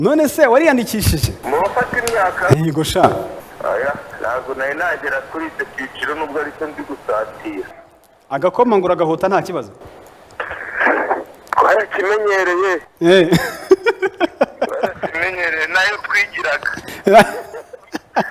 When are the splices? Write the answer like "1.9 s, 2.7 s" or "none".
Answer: 1.3 s, 3.4 s, 7.7 s